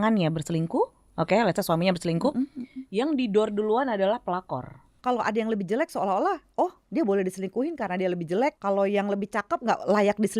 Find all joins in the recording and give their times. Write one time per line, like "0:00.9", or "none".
0:04.9
0:08.6